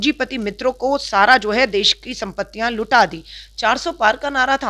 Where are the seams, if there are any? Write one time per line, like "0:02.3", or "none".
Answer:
none

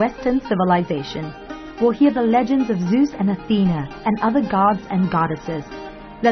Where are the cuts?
none

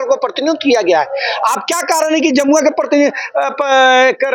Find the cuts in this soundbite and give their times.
none

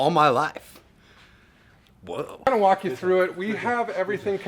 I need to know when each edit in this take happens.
0:02.3

